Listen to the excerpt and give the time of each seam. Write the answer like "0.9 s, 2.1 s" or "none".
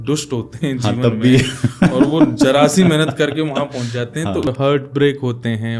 4.5 s